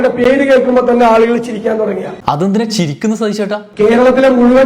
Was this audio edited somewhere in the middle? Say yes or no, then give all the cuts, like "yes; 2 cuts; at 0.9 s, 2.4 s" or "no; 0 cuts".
no; 0 cuts